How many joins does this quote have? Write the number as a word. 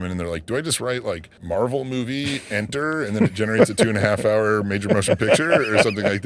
one